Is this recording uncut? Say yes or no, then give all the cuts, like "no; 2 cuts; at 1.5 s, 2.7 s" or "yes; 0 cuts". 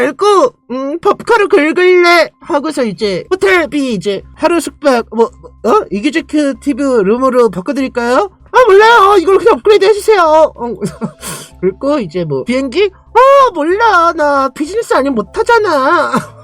yes; 0 cuts